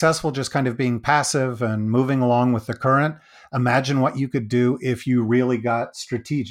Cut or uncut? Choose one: uncut